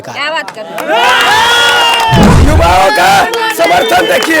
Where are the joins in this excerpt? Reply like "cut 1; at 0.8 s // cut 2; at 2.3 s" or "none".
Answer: cut 1; at 2.3 s